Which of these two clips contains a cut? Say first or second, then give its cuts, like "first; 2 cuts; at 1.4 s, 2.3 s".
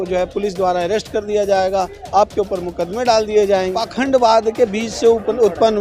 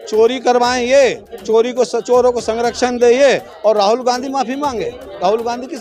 first; 1 cut; at 3.8 s